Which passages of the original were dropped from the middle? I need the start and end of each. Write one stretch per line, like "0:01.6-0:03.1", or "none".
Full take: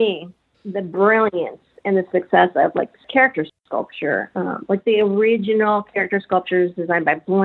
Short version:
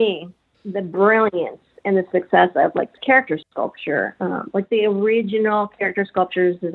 0:03.1-0:03.3